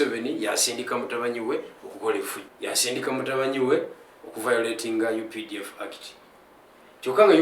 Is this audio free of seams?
no; 1 cut; at 2.4 s

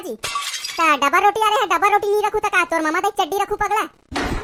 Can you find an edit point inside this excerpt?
no; 0 cuts

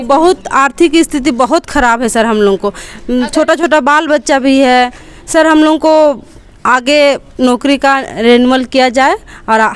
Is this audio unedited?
yes; 0 cuts

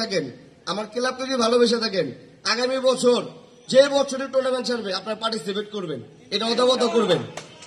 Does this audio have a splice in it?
no; 0 cuts

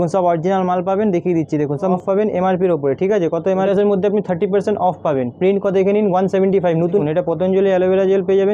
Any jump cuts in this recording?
yes; 3 cuts; at 2.0 s, 3.7 s, 7.0 s

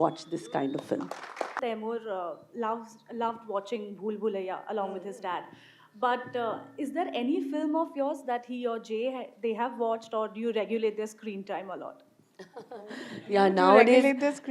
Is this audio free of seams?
no; 1 cut; at 1.6 s

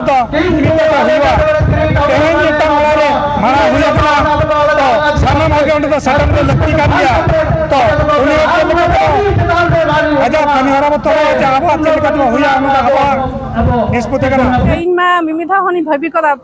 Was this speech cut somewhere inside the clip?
yes; 1 cut; at 14.8 s

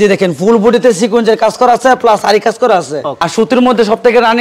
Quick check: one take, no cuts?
no; 1 cut; at 3.3 s

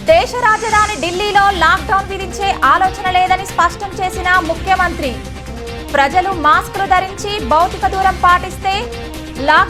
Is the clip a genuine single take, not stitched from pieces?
yes; 0 cuts

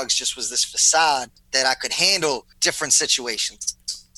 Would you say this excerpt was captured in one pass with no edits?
no; 2 cuts; at 1.4 s, 2.5 s

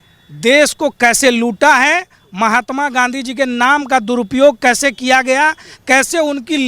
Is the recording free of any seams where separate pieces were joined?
yes; 0 cuts

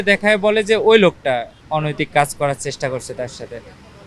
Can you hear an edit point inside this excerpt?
yes; 1 cut; at 1.6 s

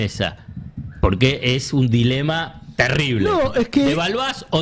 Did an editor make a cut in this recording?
no; 0 cuts

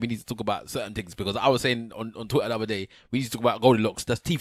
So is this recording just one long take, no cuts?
yes; 0 cuts

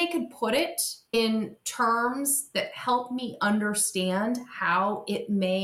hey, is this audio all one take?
yes; 0 cuts

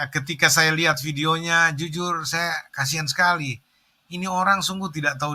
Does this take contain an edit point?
no; 0 cuts

